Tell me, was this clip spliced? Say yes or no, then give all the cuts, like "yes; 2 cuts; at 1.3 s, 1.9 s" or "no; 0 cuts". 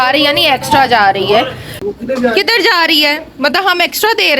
yes; 1 cut; at 1.7 s